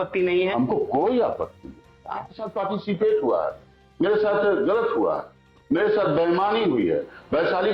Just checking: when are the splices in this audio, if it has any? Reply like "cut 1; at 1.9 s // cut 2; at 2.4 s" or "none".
cut 1; at 2.6 s